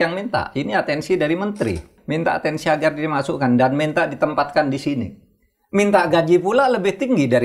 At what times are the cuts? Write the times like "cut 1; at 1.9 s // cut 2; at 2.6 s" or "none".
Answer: cut 1; at 2.0 s